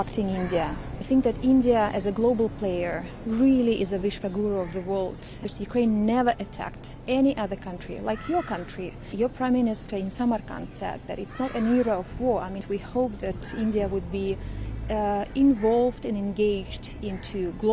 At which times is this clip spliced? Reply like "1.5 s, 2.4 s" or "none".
1.0 s, 5.5 s, 9.0 s, 12.6 s